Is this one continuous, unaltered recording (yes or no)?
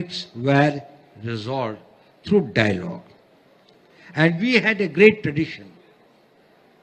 yes